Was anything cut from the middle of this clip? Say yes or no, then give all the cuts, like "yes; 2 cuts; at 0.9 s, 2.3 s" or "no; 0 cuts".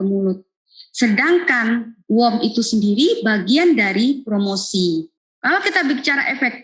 yes; 1 cut; at 5.2 s